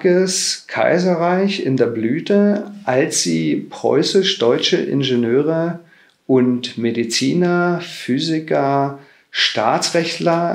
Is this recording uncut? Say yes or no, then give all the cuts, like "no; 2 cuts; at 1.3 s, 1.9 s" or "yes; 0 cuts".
yes; 0 cuts